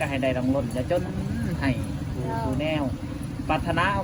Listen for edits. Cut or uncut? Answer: uncut